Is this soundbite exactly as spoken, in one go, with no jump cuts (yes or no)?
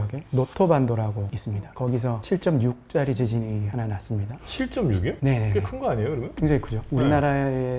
yes